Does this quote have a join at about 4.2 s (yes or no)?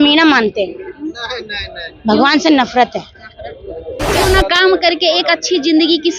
yes